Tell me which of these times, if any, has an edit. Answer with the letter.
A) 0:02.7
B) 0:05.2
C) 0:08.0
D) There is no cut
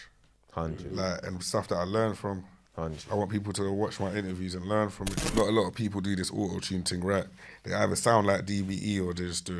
B